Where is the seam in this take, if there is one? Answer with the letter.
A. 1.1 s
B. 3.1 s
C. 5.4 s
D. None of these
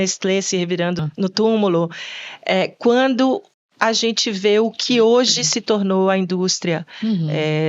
A